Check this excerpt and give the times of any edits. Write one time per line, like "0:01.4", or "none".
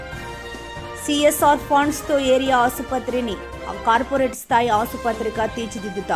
0:01.0